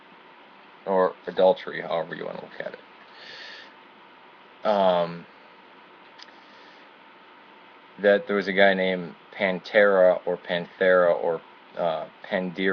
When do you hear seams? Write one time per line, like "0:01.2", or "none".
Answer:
0:11.0